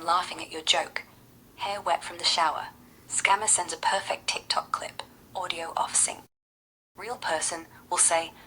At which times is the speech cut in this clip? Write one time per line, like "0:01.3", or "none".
none